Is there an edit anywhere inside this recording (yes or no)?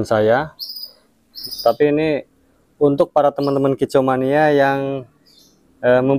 yes